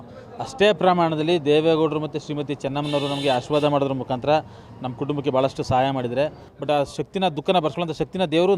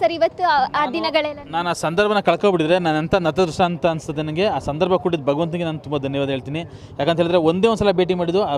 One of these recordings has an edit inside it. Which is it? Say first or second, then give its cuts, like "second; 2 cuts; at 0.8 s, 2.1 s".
first; 1 cut; at 6.5 s